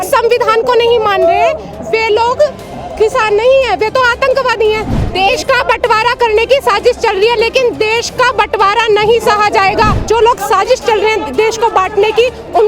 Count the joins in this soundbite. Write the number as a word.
two